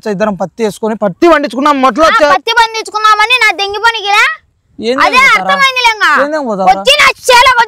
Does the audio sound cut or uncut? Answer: uncut